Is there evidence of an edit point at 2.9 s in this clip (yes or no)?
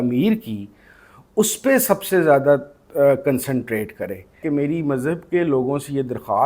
no